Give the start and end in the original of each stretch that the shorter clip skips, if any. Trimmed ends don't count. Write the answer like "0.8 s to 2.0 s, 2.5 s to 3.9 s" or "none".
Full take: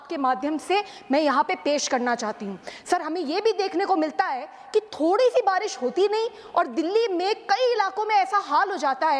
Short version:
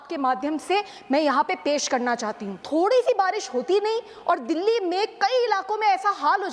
2.6 s to 4.9 s